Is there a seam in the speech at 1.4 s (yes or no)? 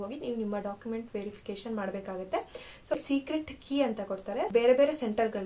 no